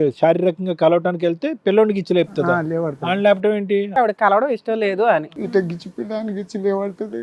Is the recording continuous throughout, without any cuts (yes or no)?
no